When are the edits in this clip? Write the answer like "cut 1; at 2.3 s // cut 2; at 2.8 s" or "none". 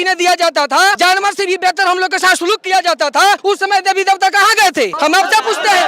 cut 1; at 1.0 s // cut 2; at 3.4 s // cut 3; at 4.9 s